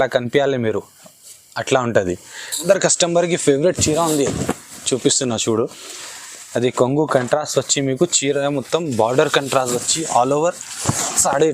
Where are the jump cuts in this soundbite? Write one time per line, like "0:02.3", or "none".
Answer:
0:02.6